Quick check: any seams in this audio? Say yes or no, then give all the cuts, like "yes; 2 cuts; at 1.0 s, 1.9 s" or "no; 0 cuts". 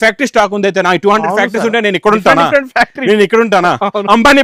no; 0 cuts